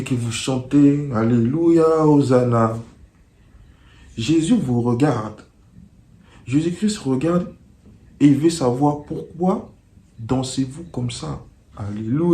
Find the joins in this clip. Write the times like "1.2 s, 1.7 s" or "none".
none